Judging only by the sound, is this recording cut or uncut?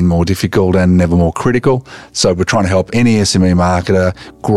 cut